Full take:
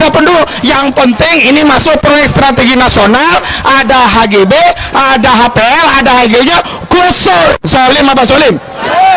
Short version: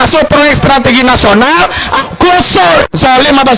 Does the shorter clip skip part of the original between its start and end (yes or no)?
yes